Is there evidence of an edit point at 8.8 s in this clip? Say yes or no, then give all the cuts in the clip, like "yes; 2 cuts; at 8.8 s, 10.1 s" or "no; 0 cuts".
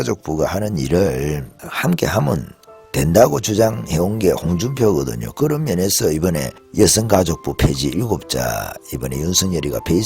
no; 1 cut; at 6.6 s